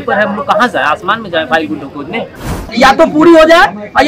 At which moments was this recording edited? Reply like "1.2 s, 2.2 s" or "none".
2.7 s